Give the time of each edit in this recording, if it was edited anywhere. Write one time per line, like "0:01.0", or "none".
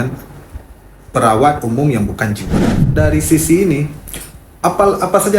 0:02.9